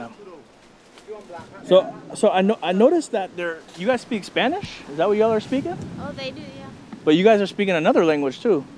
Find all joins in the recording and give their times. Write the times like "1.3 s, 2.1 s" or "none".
none